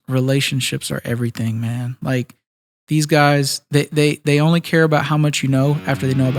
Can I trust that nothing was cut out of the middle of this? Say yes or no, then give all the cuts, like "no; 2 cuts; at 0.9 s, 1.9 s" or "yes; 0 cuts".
yes; 0 cuts